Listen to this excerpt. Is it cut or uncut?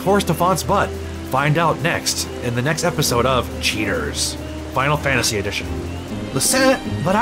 cut